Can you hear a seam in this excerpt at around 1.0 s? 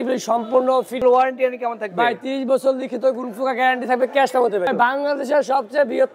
yes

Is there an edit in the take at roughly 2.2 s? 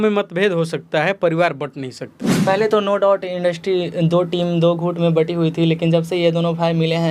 yes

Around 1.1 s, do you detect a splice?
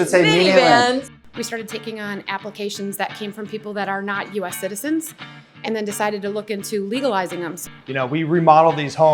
yes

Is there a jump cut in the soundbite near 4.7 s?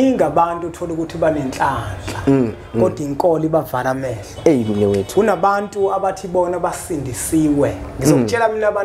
no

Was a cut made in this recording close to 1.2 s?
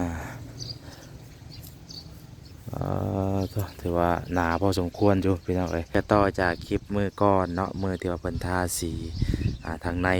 no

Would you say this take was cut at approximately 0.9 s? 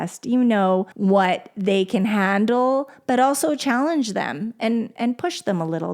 yes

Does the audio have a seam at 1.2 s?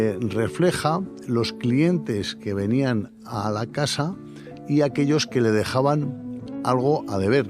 no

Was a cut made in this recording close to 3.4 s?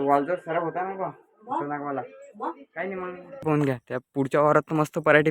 yes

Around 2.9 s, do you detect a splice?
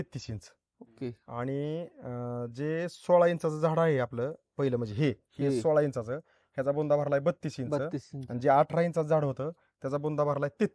no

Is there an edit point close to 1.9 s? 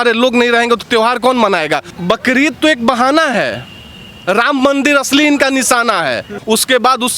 yes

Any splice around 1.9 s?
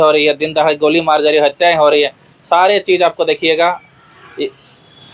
no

